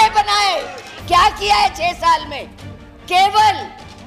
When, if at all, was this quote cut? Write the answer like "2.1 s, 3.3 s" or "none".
0.9 s